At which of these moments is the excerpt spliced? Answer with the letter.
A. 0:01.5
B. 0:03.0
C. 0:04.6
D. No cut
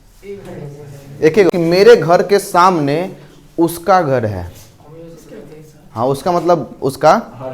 A